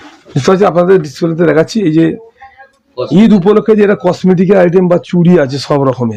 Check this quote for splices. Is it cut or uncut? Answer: uncut